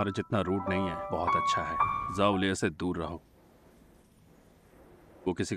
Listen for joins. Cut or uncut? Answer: cut